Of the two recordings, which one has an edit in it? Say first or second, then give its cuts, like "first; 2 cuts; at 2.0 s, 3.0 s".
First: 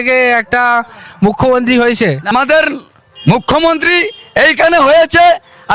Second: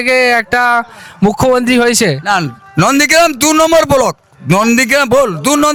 first; 1 cut; at 2.3 s